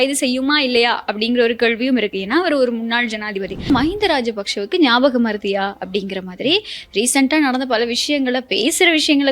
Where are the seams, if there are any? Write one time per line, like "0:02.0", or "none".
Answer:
0:03.7